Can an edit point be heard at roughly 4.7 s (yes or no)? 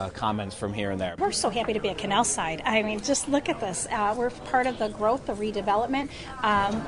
no